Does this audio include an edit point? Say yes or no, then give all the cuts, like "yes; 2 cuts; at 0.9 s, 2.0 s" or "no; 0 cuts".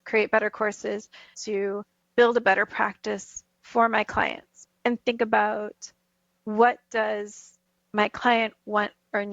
yes; 2 cuts; at 1.4 s, 4.5 s